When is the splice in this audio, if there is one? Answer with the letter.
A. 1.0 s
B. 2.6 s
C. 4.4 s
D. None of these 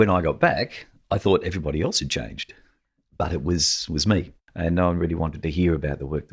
C